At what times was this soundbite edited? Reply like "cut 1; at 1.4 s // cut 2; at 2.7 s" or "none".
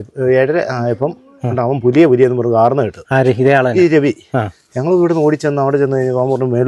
none